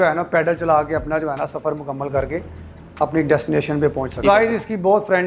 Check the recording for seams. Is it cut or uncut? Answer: cut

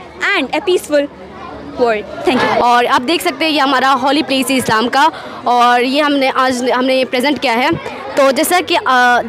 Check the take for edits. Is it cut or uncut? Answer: cut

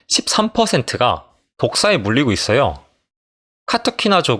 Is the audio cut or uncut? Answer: uncut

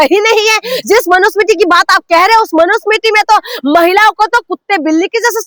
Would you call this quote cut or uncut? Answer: uncut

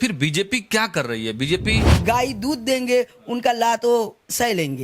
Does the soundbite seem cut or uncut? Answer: cut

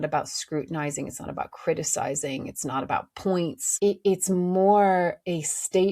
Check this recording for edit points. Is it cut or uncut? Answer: cut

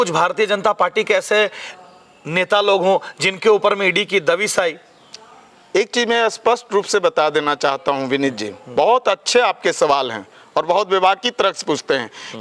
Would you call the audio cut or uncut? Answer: uncut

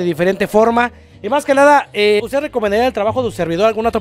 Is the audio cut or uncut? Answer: cut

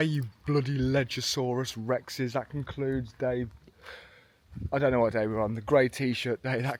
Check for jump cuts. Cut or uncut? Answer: uncut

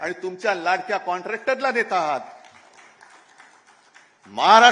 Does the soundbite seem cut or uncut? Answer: uncut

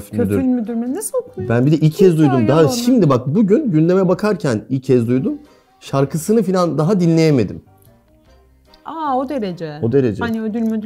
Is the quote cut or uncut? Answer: uncut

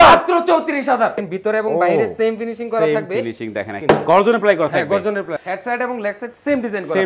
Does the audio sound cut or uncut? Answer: cut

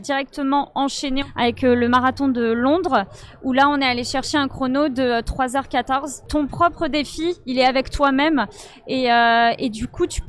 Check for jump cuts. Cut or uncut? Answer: cut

